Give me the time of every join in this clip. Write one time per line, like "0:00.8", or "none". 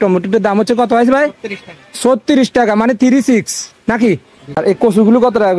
0:04.5